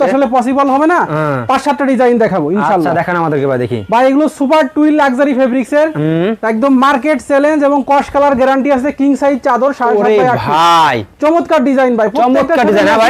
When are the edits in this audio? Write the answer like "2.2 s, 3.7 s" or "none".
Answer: none